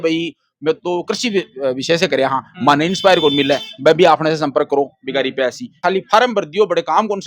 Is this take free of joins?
no; 1 cut; at 5.8 s

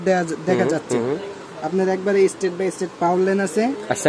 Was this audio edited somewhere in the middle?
no; 0 cuts

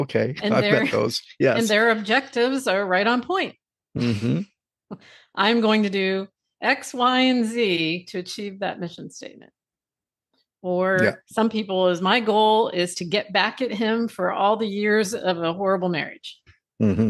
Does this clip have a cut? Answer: no; 0 cuts

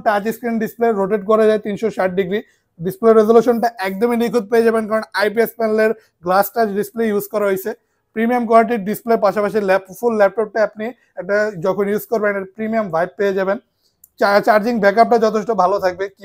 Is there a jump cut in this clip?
no; 0 cuts

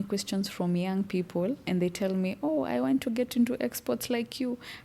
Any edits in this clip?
yes; 1 cut; at 1.6 s

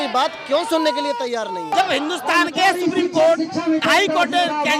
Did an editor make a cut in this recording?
yes; 1 cut; at 1.7 s

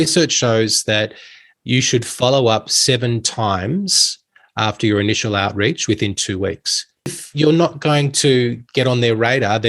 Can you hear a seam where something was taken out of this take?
yes; 1 cut; at 7.1 s

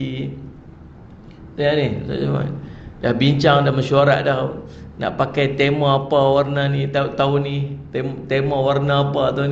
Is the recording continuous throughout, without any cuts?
yes; 0 cuts

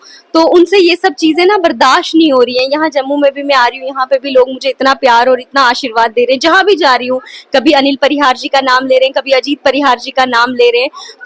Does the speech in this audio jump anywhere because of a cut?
no; 0 cuts

